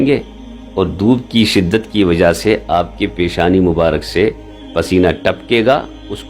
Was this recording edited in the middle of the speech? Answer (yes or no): no